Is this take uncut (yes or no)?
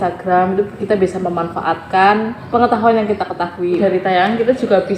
no